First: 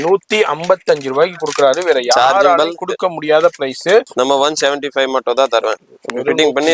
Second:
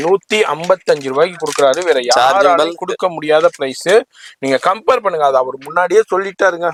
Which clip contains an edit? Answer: first; 1 cut; at 4.1 s

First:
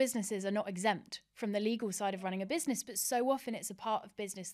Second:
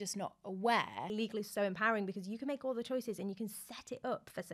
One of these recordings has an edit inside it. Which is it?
second; 1 cut; at 1.1 s

